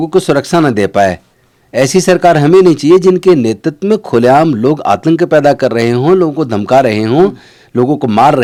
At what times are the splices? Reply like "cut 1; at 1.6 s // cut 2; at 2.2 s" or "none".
none

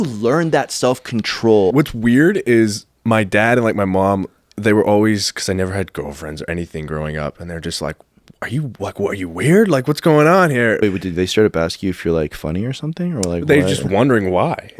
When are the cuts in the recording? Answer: cut 1; at 1.7 s // cut 2; at 10.8 s

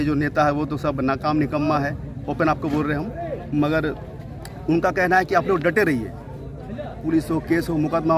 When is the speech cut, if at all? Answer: none

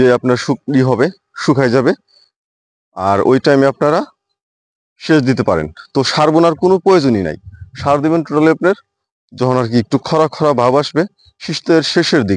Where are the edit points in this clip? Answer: none

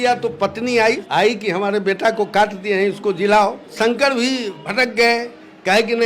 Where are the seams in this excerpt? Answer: cut 1; at 1.0 s // cut 2; at 3.8 s // cut 3; at 4.6 s

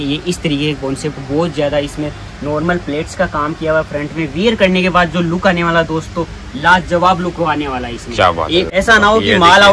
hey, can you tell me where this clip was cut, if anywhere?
cut 1; at 8.7 s

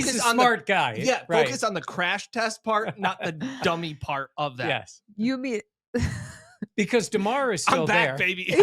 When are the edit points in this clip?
none

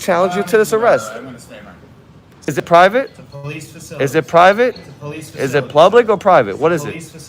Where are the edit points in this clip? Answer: cut 1; at 2.5 s

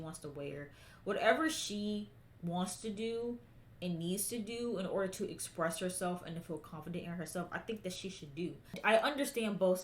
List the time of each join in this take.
cut 1; at 8.8 s

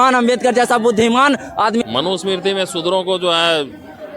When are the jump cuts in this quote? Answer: cut 1; at 1.8 s

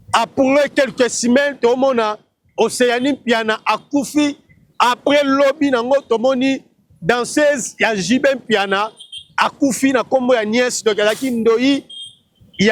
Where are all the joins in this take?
none

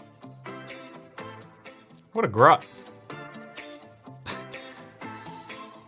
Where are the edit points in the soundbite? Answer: none

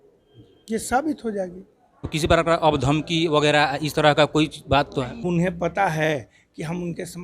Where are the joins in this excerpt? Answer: cut 1; at 2.1 s // cut 2; at 5.2 s

